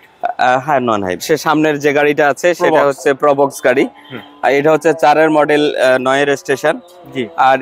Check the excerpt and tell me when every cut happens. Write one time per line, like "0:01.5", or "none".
0:01.2